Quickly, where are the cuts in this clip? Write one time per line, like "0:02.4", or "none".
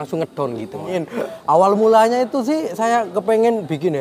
0:00.9